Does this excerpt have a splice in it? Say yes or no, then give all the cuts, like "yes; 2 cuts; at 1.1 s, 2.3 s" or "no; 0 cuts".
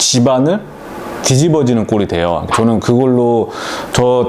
yes; 1 cut; at 2.5 s